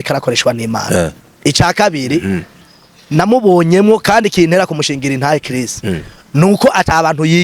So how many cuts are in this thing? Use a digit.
1